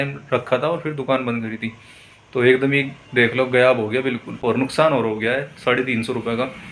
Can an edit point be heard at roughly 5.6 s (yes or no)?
no